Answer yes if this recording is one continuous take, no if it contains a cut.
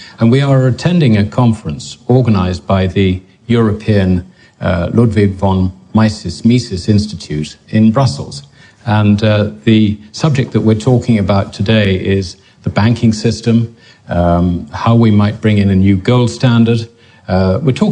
no